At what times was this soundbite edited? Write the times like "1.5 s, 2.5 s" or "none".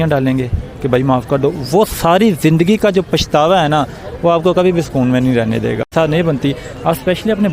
5.9 s